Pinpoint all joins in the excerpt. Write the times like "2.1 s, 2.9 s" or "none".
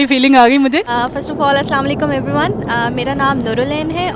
1.0 s